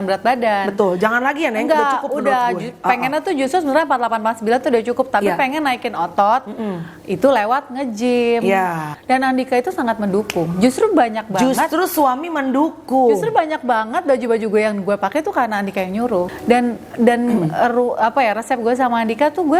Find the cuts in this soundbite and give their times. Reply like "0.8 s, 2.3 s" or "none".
8.9 s, 16.3 s